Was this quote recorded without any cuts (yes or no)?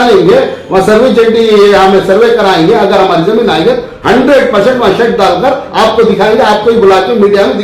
yes